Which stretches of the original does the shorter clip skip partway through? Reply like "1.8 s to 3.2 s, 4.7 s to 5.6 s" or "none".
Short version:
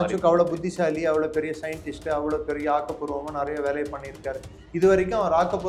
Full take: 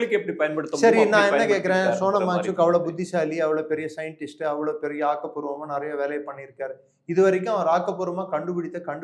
none